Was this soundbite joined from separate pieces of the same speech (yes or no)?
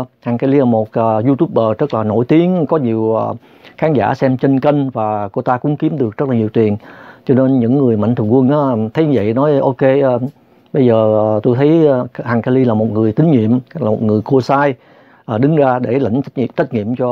no